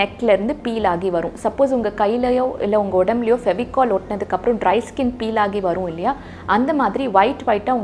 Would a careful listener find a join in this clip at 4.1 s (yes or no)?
no